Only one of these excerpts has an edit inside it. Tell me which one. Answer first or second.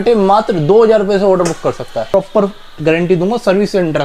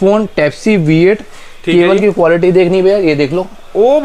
first